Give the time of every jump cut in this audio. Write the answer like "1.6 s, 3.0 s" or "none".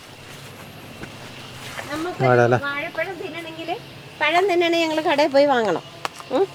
none